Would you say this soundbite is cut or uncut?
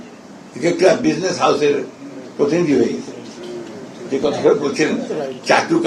uncut